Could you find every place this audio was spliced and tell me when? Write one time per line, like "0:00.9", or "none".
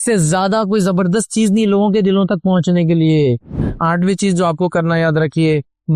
0:03.7